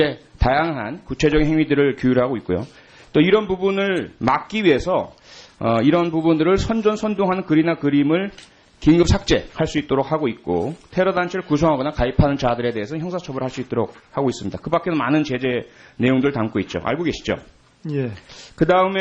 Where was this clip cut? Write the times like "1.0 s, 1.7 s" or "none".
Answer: 1.4 s